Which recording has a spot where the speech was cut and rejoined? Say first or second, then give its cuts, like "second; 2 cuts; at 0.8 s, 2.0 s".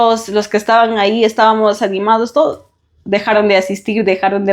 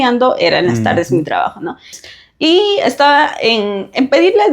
second; 1 cut; at 2.1 s